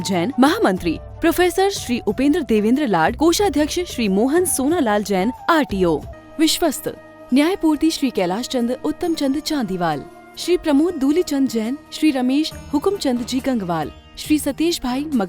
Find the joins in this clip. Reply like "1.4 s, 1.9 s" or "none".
6.1 s